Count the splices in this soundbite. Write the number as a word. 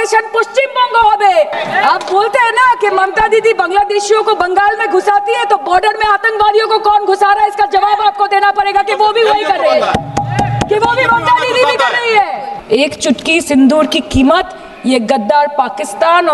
two